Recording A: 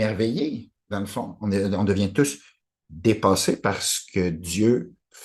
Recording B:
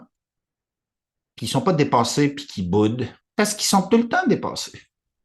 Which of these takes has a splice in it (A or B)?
B